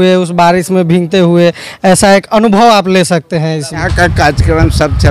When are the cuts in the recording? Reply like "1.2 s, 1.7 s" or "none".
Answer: 3.9 s